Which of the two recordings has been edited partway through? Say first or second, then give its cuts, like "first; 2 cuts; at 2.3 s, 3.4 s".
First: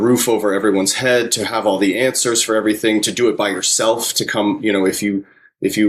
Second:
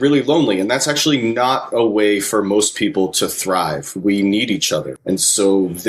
second; 1 cut; at 4.9 s